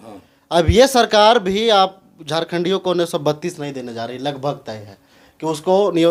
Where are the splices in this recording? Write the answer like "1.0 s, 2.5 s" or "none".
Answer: none